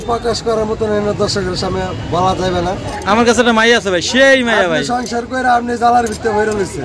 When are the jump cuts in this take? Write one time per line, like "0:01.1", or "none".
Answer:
0:02.9